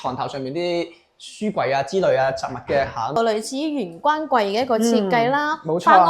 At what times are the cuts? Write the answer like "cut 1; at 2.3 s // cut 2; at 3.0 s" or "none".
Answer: cut 1; at 3.2 s